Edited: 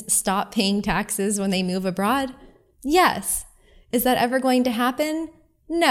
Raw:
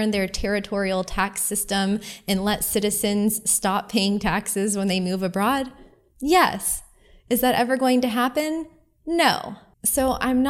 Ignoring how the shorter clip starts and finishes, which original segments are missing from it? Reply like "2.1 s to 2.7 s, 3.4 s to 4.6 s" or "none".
none